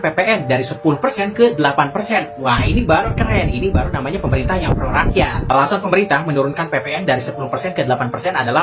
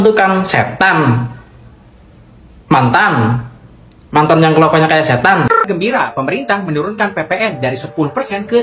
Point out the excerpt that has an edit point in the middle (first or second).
second